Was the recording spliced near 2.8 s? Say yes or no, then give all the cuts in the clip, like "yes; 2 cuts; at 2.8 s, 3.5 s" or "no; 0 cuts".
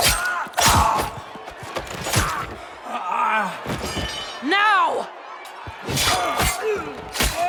no; 0 cuts